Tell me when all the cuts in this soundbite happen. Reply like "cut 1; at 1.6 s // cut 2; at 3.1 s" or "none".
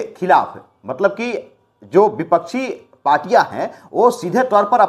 none